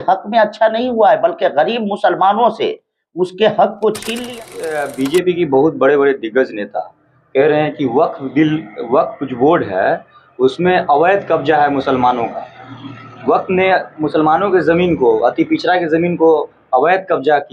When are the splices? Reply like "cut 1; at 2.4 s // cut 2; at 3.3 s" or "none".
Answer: cut 1; at 4.3 s